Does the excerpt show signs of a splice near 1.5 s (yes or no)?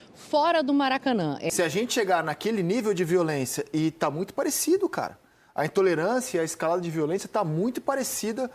yes